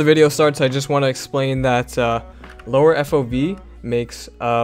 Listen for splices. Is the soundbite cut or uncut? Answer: uncut